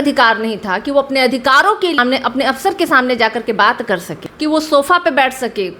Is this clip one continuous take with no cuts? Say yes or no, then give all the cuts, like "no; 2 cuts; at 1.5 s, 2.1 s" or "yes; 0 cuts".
no; 2 cuts; at 2.0 s, 4.2 s